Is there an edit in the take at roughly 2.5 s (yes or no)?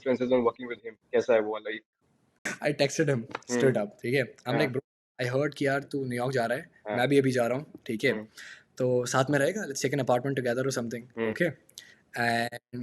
yes